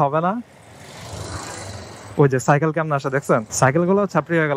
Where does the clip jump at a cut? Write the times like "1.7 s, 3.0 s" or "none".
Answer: 3.5 s

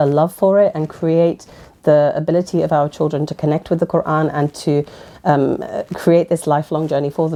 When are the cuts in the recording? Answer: none

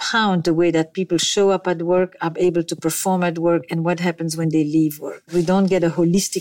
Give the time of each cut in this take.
5.3 s

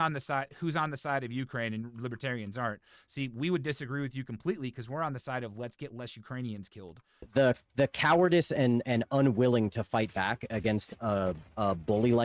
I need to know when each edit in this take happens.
7.3 s

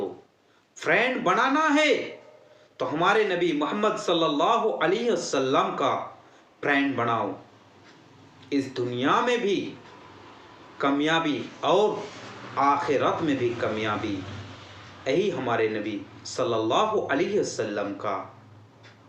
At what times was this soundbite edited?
none

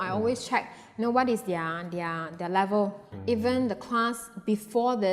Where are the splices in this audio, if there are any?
3.1 s

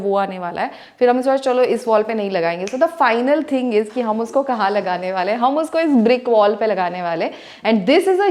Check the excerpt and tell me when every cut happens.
none

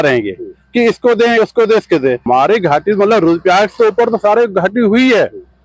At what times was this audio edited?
2.2 s

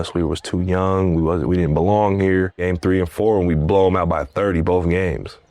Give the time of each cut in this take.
2.6 s

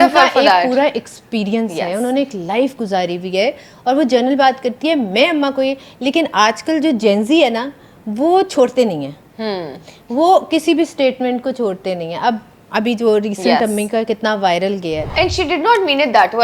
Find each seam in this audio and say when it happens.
none

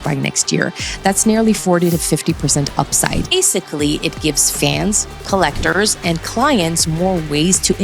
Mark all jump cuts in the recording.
3.3 s

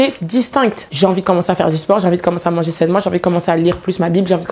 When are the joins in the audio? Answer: 0.9 s

